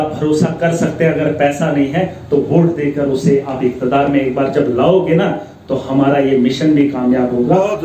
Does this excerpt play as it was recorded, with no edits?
no; 1 cut; at 2.7 s

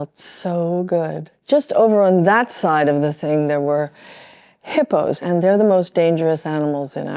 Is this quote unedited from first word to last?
no; 2 cuts; at 1.3 s, 5.2 s

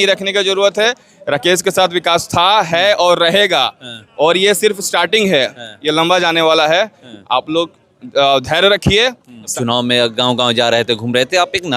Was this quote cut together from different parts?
yes; 1 cut; at 9.5 s

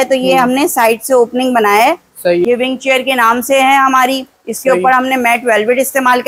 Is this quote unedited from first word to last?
no; 1 cut; at 2.5 s

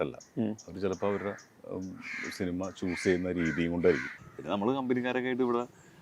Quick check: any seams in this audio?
yes; 1 cut; at 4.1 s

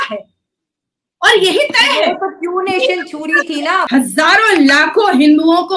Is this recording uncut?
no; 1 cut; at 3.9 s

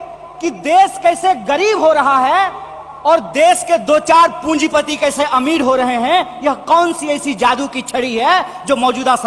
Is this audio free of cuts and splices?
yes; 0 cuts

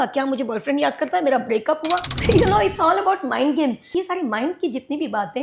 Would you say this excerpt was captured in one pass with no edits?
no; 2 cuts; at 2.1 s, 3.9 s

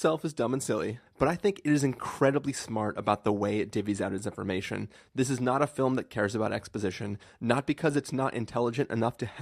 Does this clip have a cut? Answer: yes; 1 cut; at 1.0 s

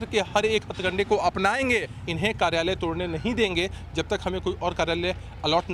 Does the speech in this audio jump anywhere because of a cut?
yes; 1 cut; at 2.0 s

